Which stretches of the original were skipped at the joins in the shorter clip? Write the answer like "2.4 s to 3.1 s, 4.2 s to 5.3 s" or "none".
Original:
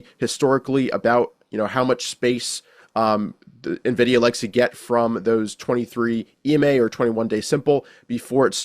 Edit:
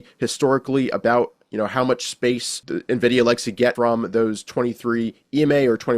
2.6 s to 3.5 s, 4.7 s to 4.9 s